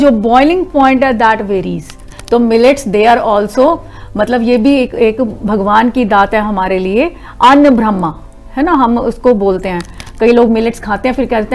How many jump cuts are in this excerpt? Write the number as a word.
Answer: two